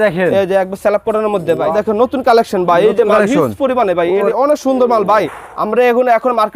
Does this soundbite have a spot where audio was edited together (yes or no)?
yes